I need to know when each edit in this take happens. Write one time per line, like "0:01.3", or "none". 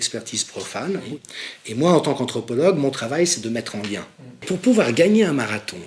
0:01.0
0:04.4